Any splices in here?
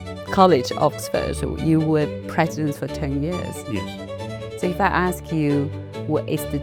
no; 0 cuts

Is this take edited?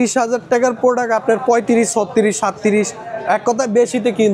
no; 0 cuts

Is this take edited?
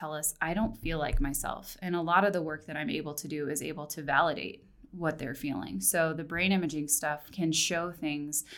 no; 0 cuts

